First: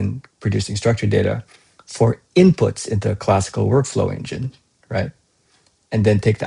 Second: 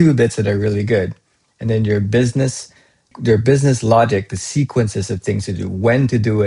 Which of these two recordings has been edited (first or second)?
second